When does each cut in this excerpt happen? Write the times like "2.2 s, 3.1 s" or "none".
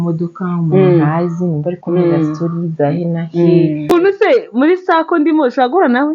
3.9 s